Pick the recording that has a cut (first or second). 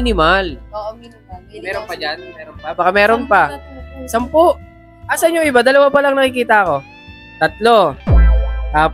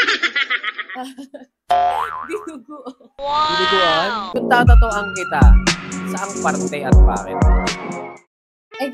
second